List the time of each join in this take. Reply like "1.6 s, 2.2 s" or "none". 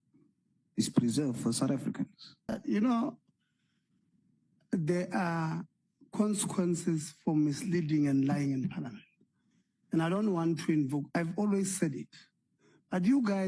2.6 s

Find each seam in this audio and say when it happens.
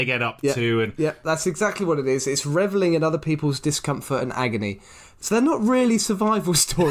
5.1 s

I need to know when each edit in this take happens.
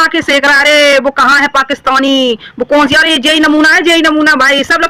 none

